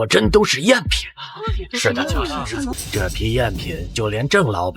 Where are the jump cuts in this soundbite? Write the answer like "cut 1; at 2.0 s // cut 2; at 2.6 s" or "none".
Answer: cut 1; at 2.8 s